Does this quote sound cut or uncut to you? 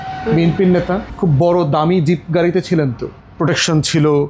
uncut